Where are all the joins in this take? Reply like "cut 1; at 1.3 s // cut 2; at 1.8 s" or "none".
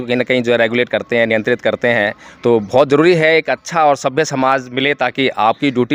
none